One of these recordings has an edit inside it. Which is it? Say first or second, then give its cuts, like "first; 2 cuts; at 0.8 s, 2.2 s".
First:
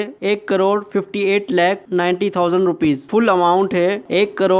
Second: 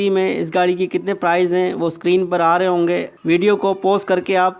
second; 1 cut; at 1.8 s